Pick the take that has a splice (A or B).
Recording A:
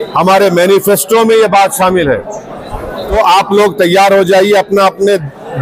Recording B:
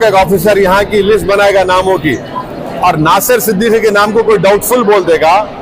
A